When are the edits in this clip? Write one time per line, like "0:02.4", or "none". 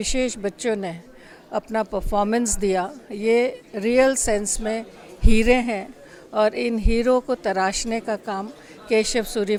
none